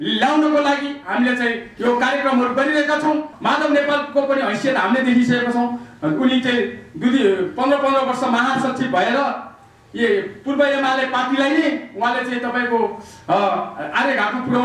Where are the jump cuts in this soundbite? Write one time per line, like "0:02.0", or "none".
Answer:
0:03.3